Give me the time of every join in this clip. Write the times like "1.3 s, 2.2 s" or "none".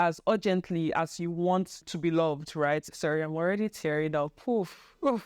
1.8 s, 2.9 s